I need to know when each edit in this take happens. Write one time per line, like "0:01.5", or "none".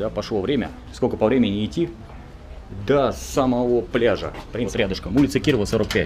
0:04.7